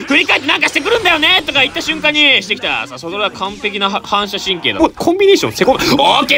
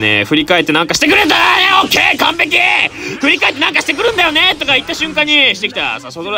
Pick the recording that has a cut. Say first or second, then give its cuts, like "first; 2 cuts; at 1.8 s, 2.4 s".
first; 1 cut; at 4.8 s